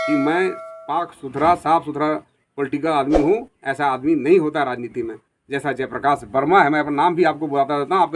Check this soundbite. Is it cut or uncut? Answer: uncut